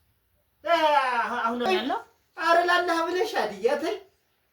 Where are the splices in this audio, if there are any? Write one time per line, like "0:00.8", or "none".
0:01.6